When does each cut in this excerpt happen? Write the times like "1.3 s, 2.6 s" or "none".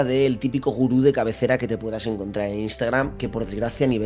none